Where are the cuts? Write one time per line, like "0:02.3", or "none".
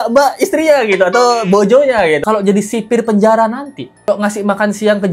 0:02.2
0:04.1